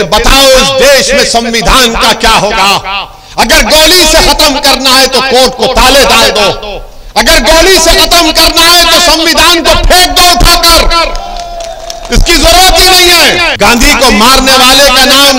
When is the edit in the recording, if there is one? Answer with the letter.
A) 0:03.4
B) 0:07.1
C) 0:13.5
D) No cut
C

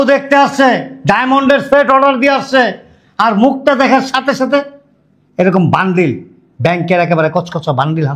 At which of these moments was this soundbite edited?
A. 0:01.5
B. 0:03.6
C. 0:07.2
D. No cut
D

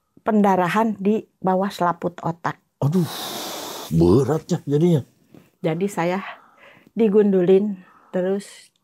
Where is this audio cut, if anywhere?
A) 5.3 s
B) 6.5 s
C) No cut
C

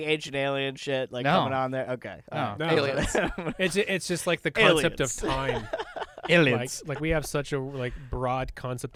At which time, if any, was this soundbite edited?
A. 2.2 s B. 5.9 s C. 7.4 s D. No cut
D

